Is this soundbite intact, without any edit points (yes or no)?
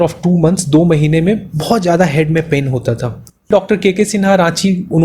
no